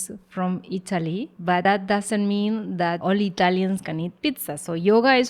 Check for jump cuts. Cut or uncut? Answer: cut